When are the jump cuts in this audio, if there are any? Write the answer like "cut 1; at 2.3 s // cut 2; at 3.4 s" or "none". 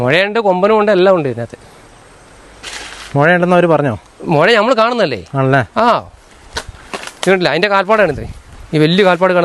none